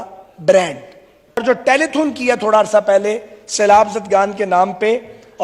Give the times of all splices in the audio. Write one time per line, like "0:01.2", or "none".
0:01.4